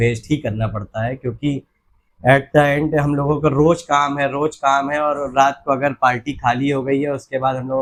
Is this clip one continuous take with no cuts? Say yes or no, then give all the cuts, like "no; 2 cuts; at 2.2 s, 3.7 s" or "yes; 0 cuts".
yes; 0 cuts